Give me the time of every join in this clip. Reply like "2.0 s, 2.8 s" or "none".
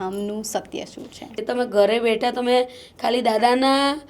1.3 s